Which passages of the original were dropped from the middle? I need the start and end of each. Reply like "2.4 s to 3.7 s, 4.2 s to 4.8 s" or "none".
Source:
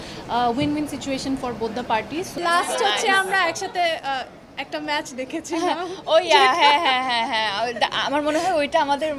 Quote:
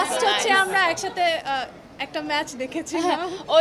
none